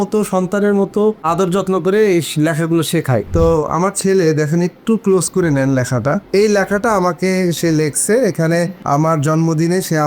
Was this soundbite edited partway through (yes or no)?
yes